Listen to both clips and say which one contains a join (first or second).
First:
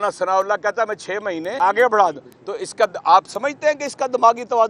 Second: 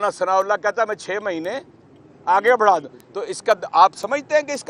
first